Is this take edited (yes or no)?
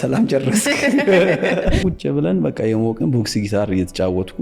yes